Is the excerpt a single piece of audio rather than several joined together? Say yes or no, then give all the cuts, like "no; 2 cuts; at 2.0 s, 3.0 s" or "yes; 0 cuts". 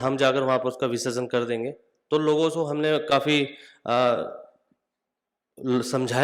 yes; 0 cuts